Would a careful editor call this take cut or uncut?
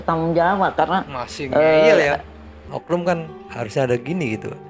cut